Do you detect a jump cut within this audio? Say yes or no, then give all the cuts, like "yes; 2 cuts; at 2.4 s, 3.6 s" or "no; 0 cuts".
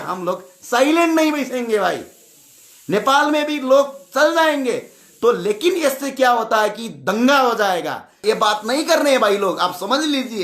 yes; 1 cut; at 8.2 s